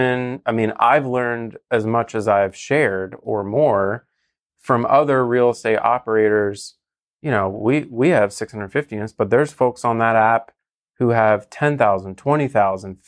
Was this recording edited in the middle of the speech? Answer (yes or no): no